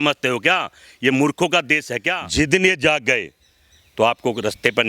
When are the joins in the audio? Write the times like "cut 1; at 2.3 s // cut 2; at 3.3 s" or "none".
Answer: cut 1; at 2.2 s